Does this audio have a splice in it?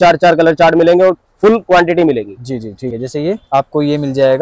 yes; 1 cut; at 2.9 s

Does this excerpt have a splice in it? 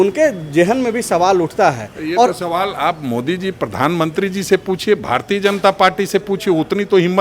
no; 0 cuts

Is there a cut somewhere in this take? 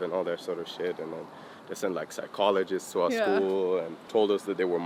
no; 0 cuts

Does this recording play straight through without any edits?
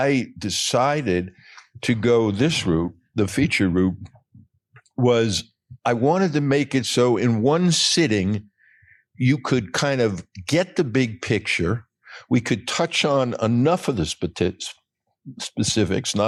yes; 0 cuts

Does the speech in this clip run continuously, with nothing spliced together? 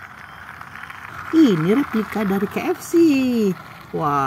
no; 1 cut; at 1.1 s

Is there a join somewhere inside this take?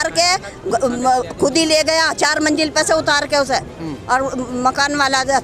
no; 0 cuts

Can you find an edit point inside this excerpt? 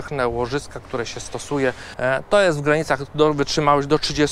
yes; 1 cut; at 1.9 s

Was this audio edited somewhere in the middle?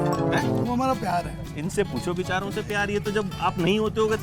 no; 0 cuts

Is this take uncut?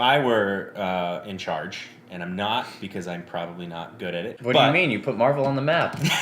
no; 1 cut; at 4.3 s

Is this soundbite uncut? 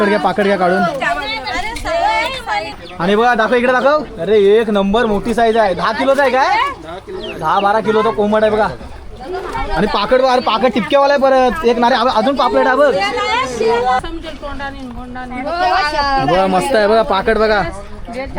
no; 2 cuts; at 2.7 s, 14.0 s

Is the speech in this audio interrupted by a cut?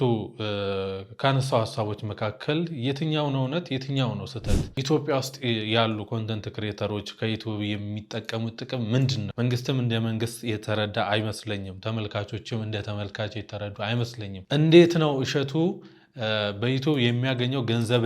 yes; 3 cuts; at 4.8 s, 9.3 s, 14.4 s

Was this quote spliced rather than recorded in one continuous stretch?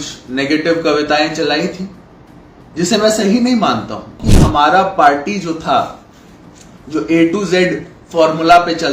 yes; 1 cut; at 4.2 s

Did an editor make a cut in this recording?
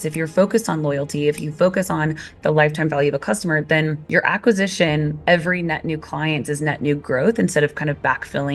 no; 0 cuts

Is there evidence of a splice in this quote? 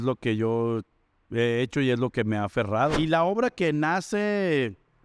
yes; 1 cut; at 2.9 s

